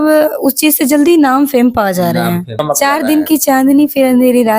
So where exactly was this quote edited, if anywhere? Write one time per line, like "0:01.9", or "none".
0:02.5

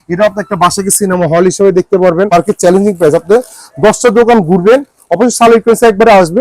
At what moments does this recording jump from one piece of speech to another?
0:02.3

